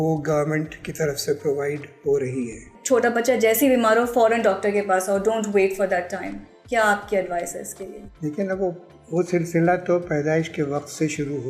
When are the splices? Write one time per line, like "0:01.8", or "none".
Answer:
0:02.7